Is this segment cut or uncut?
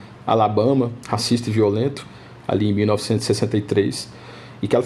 uncut